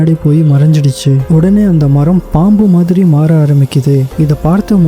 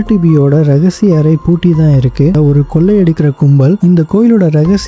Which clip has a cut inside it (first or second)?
second